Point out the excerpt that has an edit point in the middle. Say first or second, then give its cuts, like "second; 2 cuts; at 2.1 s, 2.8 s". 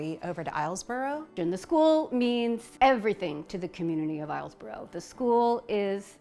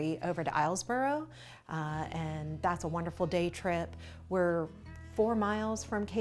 first; 2 cuts; at 1.3 s, 2.7 s